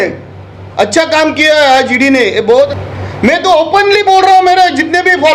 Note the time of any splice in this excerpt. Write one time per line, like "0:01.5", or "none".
0:02.7